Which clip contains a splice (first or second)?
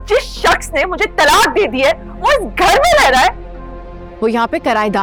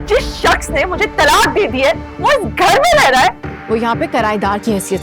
second